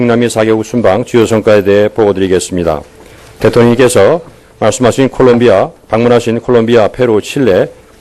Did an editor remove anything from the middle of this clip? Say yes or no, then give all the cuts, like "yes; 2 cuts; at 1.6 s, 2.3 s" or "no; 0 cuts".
yes; 1 cut; at 3.2 s